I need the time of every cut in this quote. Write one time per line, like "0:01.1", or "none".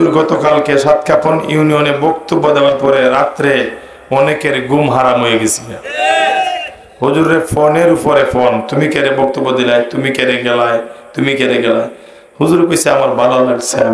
none